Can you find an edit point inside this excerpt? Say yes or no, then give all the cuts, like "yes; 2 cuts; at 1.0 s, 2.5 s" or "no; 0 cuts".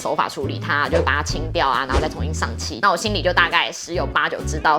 yes; 1 cut; at 2.8 s